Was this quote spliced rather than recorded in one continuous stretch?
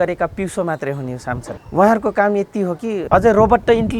yes; 2 cuts; at 1.5 s, 3.0 s

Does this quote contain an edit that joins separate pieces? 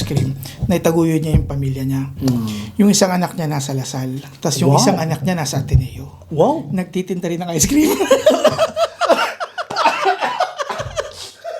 no; 0 cuts

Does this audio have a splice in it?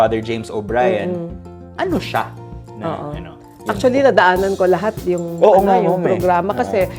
no; 0 cuts

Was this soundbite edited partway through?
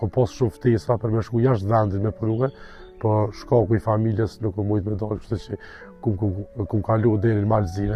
no; 0 cuts

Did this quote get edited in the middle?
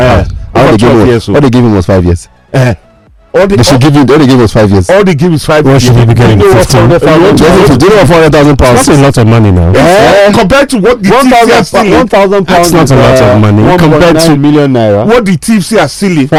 no; 0 cuts

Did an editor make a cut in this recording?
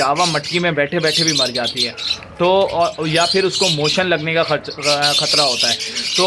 no; 0 cuts

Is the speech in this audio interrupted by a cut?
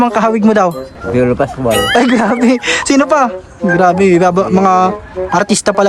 yes; 1 cut; at 1.0 s

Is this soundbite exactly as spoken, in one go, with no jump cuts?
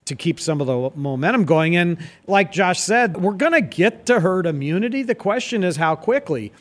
yes; 0 cuts

